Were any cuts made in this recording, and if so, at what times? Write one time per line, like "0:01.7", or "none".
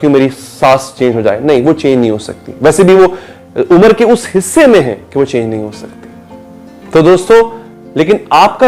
none